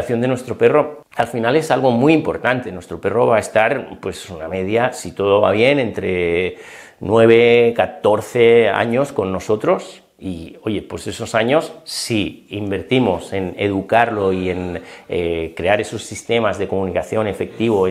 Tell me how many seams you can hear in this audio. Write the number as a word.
one